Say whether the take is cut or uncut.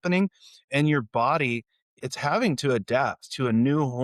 cut